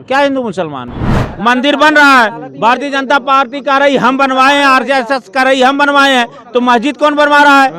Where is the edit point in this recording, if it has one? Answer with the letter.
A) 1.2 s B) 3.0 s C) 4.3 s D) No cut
A